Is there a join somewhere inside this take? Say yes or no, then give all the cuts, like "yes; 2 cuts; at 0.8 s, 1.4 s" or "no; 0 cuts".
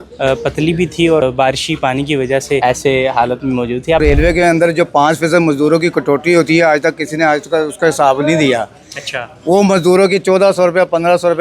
yes; 3 cuts; at 1.2 s, 2.6 s, 4.0 s